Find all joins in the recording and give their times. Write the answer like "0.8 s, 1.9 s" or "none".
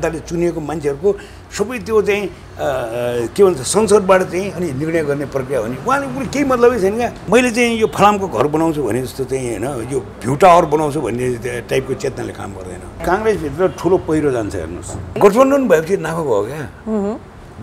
7.2 s, 13.0 s, 15.2 s

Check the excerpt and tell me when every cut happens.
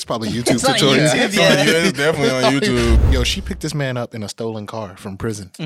3.0 s

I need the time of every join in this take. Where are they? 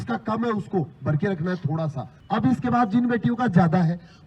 2.1 s

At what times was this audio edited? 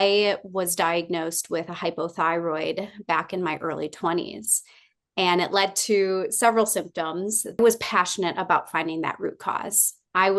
7.6 s

